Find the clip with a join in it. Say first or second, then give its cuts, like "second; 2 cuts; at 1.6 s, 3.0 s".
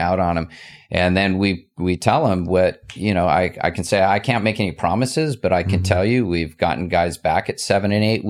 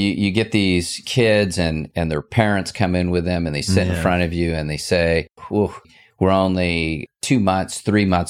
second; 4 cuts; at 1.0 s, 1.9 s, 5.6 s, 7.0 s